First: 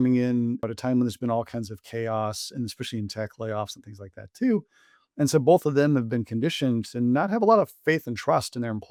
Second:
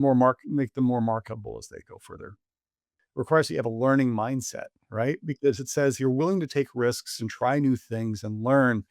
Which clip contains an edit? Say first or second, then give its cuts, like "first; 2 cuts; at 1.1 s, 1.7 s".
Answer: second; 1 cut; at 2.7 s